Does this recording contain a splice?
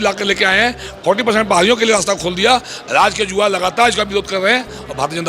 no; 0 cuts

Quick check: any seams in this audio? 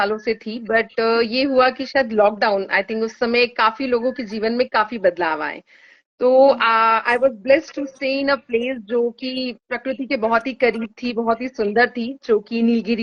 no; 0 cuts

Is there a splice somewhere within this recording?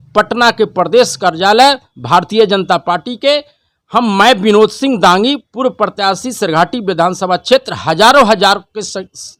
no; 0 cuts

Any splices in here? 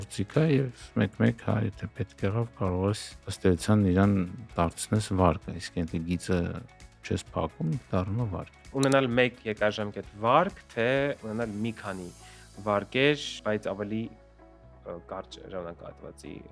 yes; 2 cuts; at 8.7 s, 11.2 s

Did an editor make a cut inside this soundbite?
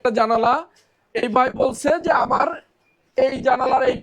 no; 0 cuts

